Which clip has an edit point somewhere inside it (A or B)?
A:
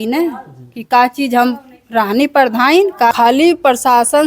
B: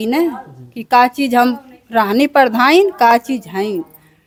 A